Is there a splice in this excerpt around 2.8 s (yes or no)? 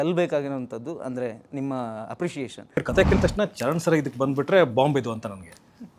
yes